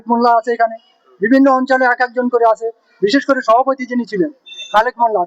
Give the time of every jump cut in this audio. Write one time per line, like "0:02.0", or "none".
none